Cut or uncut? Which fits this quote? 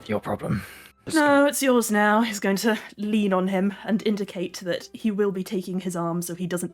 cut